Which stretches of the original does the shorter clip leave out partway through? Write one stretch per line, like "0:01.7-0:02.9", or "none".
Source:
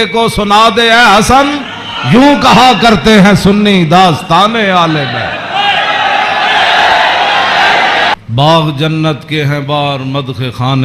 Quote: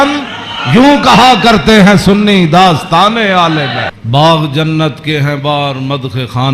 0:05.4-0:08.2